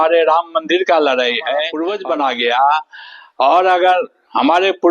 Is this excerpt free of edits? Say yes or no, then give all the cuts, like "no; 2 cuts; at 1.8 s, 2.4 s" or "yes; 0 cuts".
no; 1 cut; at 1.8 s